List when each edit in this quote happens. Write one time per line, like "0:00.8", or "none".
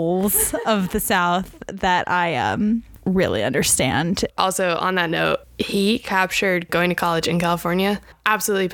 0:04.3
0:05.5